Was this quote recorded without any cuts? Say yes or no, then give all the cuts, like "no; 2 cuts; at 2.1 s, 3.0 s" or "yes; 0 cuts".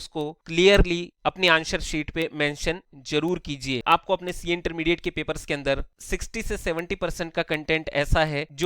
no; 1 cut; at 3.8 s